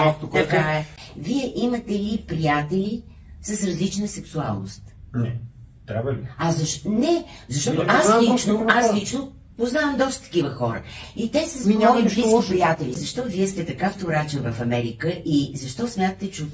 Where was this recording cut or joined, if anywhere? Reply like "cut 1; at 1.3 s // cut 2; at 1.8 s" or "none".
cut 1; at 1.0 s // cut 2; at 13.0 s